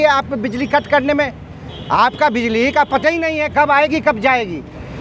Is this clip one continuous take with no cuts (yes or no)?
yes